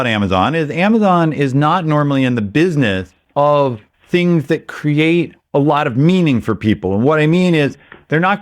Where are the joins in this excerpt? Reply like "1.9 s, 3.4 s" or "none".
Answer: 3.1 s, 3.9 s, 5.4 s